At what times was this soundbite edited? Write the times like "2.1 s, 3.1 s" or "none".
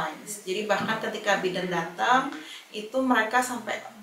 none